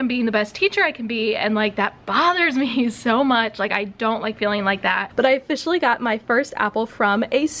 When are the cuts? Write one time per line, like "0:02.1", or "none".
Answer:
0:05.1